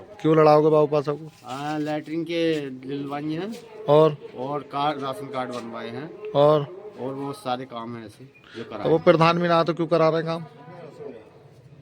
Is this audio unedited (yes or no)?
yes